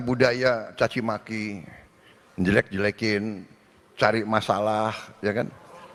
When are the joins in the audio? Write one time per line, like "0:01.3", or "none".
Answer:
none